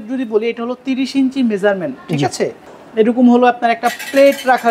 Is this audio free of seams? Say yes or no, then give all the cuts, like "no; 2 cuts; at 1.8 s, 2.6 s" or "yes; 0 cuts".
no; 1 cut; at 2.8 s